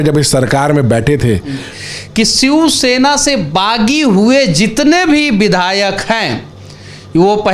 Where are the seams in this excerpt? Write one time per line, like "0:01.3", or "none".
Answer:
0:01.7